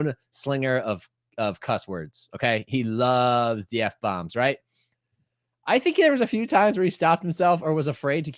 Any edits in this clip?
no; 0 cuts

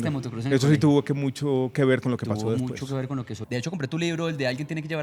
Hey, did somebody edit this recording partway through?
yes; 1 cut; at 3.4 s

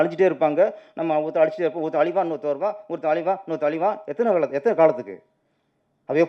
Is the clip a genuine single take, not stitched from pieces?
yes; 0 cuts

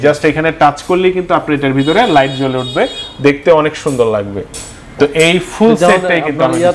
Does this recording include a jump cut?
no; 0 cuts

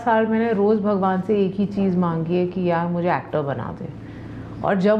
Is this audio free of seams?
yes; 0 cuts

